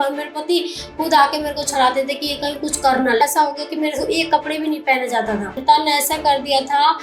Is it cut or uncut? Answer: cut